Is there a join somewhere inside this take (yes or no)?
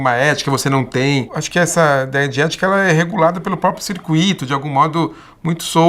yes